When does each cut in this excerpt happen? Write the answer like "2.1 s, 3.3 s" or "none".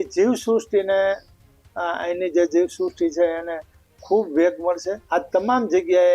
5.0 s